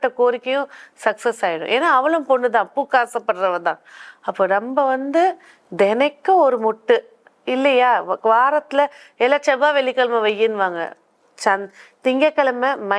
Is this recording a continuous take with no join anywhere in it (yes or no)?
yes